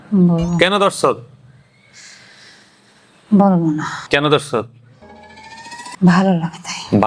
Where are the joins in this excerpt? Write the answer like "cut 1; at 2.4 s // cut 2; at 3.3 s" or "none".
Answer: none